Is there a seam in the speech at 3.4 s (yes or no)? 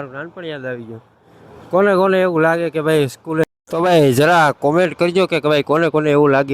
yes